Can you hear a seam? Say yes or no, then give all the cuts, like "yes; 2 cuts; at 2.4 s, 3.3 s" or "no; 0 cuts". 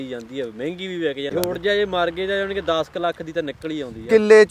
yes; 1 cut; at 1.3 s